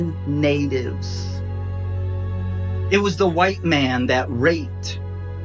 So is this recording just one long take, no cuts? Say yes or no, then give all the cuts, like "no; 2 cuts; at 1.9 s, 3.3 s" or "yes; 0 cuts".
yes; 0 cuts